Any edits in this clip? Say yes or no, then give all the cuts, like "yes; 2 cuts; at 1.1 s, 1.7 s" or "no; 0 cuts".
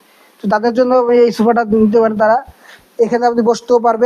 no; 0 cuts